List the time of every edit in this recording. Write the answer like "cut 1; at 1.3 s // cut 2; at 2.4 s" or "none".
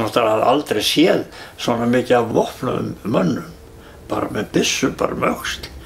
cut 1; at 2.3 s